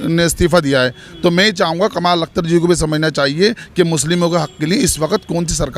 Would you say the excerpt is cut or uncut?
uncut